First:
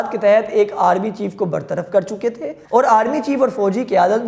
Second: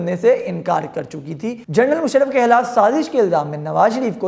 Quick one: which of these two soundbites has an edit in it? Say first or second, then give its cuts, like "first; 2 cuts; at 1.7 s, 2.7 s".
second; 1 cut; at 1.6 s